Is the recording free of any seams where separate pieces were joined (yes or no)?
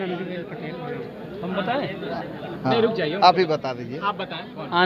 yes